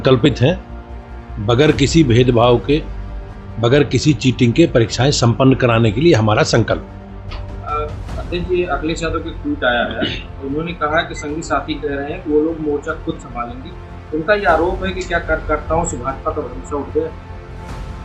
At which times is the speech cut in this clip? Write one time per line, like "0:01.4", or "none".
0:17.1